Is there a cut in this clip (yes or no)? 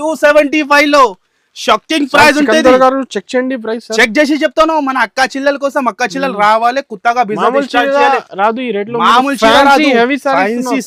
no